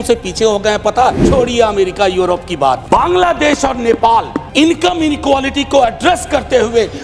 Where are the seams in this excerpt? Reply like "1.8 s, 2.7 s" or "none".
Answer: 1.2 s, 2.8 s, 4.4 s